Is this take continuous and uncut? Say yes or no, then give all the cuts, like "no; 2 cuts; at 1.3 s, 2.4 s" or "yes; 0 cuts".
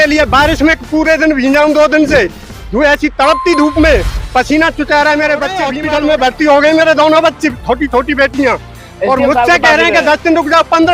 no; 1 cut; at 5.7 s